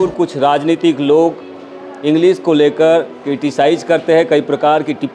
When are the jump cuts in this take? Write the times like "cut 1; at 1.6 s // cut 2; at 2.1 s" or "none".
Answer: none